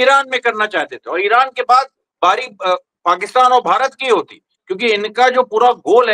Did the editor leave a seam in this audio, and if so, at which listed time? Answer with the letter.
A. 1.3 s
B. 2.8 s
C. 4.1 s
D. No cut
D